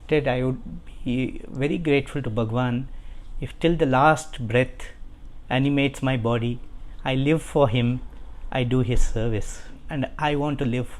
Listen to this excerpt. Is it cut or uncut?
cut